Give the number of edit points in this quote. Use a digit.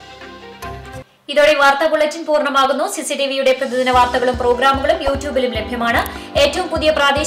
0